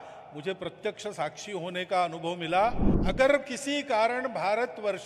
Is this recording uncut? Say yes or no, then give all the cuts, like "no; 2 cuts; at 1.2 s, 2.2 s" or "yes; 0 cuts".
no; 1 cut; at 2.9 s